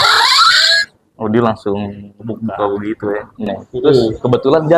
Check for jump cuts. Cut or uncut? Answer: cut